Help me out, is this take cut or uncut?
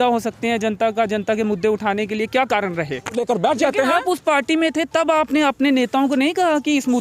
cut